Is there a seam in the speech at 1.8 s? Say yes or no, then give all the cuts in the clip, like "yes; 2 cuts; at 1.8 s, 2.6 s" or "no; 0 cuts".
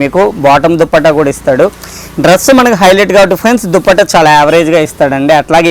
no; 0 cuts